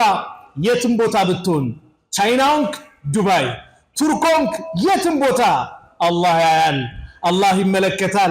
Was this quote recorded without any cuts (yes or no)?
yes